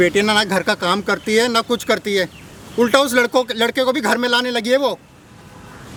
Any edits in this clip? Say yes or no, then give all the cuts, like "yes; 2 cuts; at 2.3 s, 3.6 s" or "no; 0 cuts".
no; 0 cuts